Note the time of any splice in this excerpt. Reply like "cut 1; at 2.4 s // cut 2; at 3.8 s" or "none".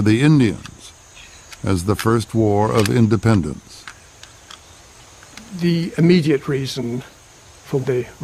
cut 1; at 2.7 s